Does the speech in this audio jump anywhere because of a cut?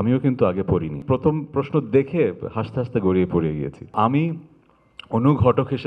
yes; 2 cuts; at 1.0 s, 3.9 s

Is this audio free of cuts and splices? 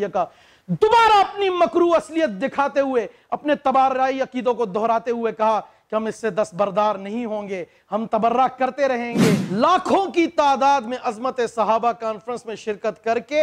no; 1 cut; at 9.4 s

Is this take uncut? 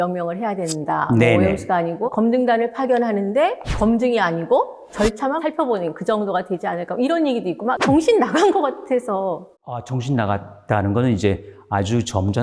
no; 2 cuts; at 2.0 s, 7.8 s

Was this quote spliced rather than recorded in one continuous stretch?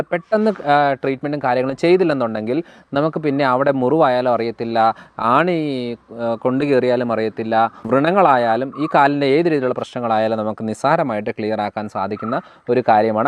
yes; 1 cut; at 7.8 s

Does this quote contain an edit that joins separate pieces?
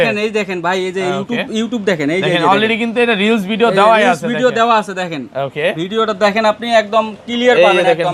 no; 0 cuts

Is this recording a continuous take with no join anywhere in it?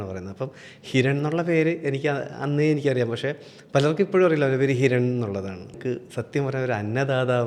no; 1 cut; at 5.8 s

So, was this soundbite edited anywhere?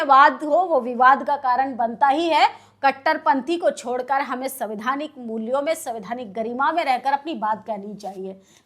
no; 0 cuts

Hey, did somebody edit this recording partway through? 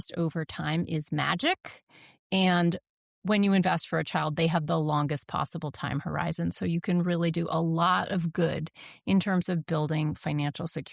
no; 0 cuts

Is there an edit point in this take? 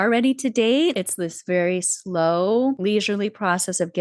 yes; 2 cuts; at 0.9 s, 2.8 s

